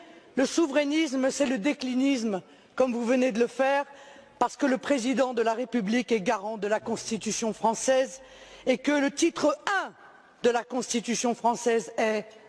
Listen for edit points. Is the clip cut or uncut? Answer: cut